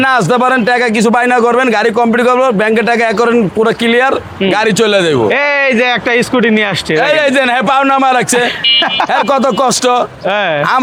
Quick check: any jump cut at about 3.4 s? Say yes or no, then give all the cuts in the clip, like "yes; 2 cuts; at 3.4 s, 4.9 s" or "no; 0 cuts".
no; 0 cuts